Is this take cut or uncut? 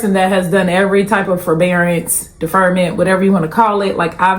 uncut